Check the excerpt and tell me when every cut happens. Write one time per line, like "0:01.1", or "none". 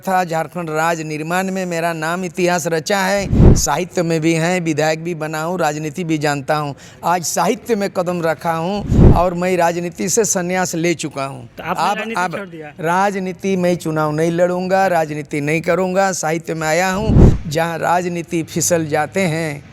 0:17.3